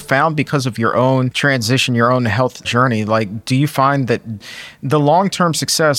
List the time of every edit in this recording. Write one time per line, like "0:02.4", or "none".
0:01.3
0:02.6
0:04.4